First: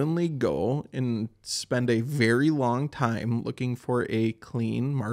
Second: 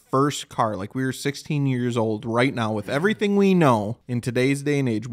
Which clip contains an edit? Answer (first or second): second